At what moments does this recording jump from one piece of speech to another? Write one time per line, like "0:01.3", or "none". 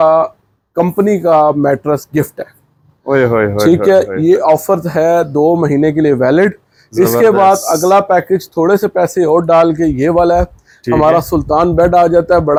none